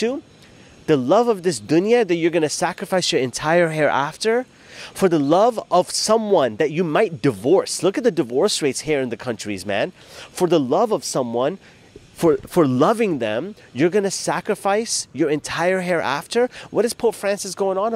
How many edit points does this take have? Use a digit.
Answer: 0